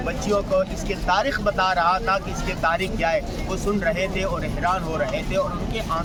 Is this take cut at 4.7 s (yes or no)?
no